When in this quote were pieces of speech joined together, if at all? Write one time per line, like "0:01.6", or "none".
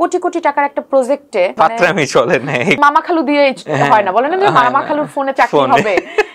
0:01.5
0:02.8

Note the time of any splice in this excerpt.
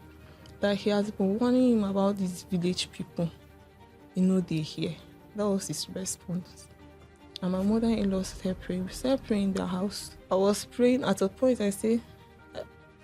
0:10.1

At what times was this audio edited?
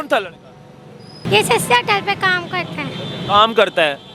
0:01.2

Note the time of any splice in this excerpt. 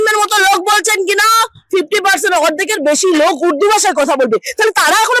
none

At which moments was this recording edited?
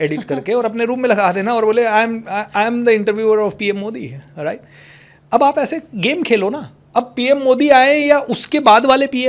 none

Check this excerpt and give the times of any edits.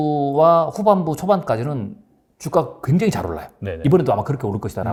none

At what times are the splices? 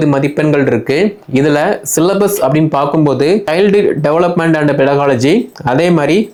none

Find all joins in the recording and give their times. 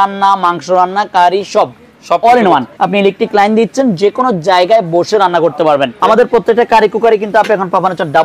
0:02.7
0:05.9

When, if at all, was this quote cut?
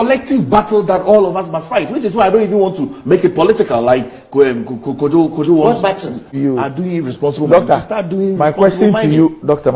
0:06.3

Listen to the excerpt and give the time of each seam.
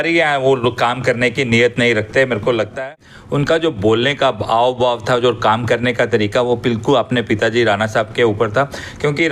0:02.8

